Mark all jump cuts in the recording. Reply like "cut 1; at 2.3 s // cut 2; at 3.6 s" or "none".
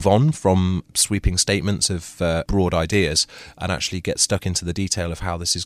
cut 1; at 0.9 s // cut 2; at 2.5 s